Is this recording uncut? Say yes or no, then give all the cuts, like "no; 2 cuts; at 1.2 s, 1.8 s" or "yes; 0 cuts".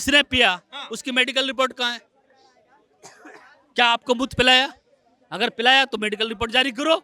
yes; 0 cuts